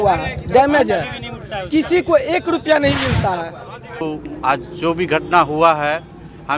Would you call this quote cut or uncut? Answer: cut